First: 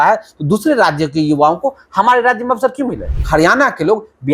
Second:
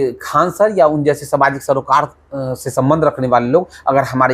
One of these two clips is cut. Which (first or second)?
first